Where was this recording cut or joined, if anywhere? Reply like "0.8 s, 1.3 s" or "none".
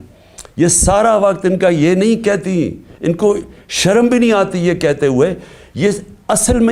none